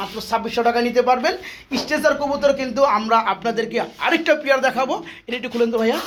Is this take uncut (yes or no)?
yes